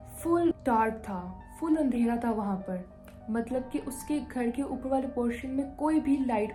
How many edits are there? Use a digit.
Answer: 0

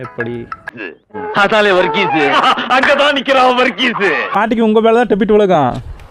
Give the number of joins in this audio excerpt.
1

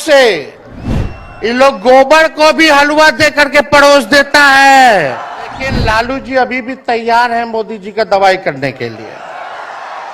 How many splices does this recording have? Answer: 1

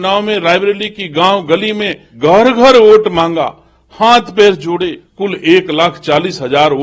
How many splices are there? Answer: 2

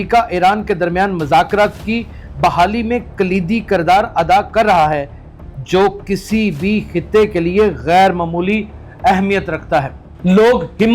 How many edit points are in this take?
1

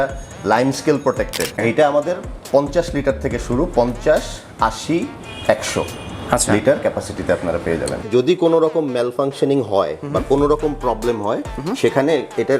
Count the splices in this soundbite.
2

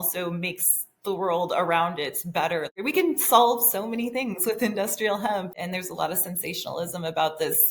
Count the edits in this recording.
2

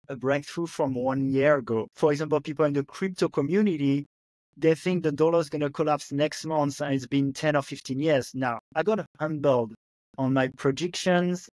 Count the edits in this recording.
2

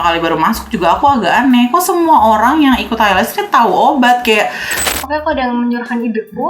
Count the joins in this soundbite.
1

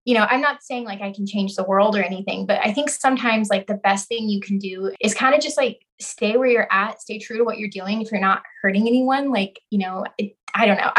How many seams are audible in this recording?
1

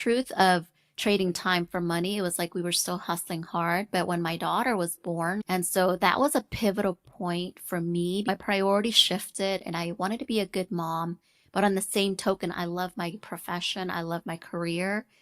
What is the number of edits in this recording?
2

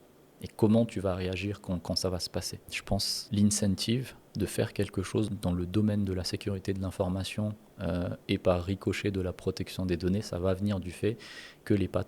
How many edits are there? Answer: 2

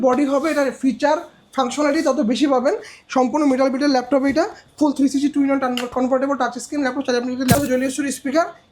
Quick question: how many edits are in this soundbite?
1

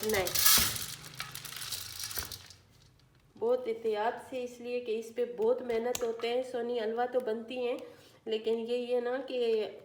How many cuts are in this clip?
0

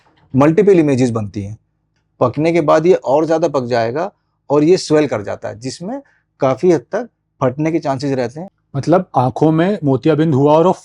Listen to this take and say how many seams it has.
2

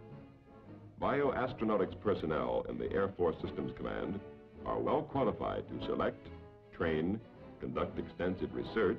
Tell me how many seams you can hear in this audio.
1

